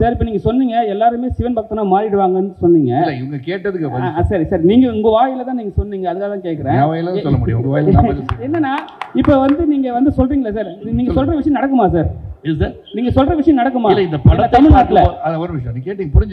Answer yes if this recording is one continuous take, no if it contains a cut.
yes